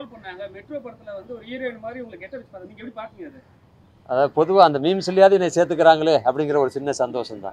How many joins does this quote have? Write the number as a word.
zero